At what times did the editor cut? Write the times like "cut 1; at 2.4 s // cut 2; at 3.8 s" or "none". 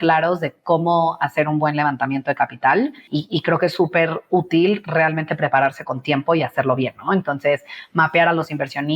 cut 1; at 3.1 s